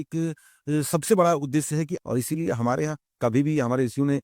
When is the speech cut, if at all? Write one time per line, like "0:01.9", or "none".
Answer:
0:02.0